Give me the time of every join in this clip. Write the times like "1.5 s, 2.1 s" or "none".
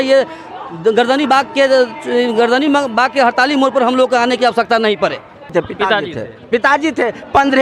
5.5 s